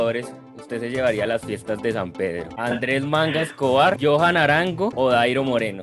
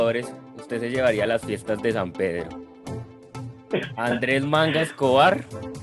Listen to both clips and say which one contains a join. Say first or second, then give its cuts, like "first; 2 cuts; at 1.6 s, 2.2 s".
first; 3 cuts; at 2.5 s, 4.0 s, 4.9 s